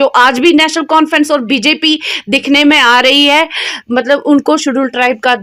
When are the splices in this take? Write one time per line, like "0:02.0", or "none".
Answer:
none